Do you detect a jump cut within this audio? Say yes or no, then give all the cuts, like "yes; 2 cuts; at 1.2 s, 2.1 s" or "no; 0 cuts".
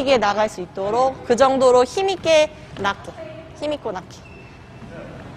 no; 0 cuts